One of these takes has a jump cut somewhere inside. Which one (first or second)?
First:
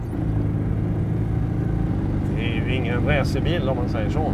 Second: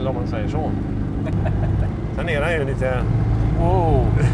second